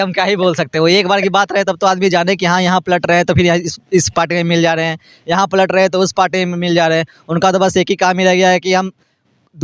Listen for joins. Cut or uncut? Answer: uncut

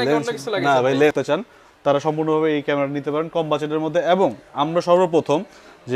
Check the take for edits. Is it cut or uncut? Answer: cut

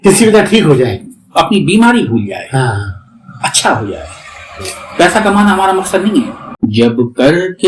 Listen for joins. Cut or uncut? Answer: cut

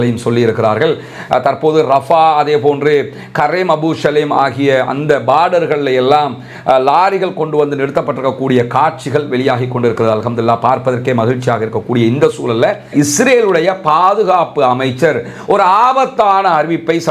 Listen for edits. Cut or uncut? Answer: cut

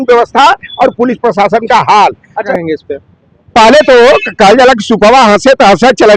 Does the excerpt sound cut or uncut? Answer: cut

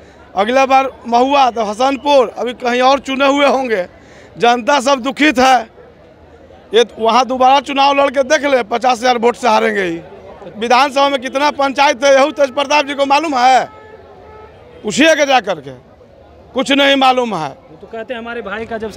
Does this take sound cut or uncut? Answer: cut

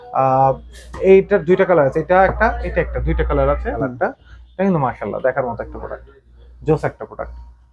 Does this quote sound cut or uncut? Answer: cut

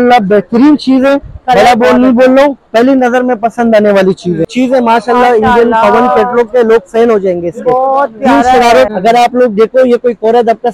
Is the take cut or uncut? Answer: cut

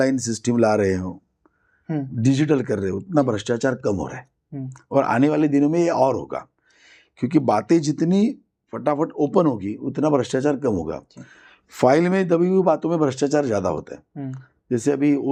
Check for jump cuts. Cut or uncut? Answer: uncut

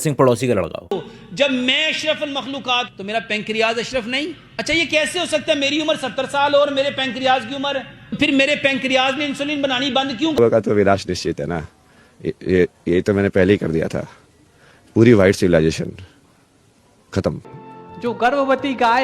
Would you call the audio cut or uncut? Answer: cut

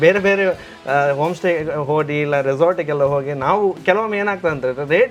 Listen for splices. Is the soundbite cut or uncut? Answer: uncut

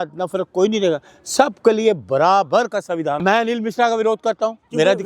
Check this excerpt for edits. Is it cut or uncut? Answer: cut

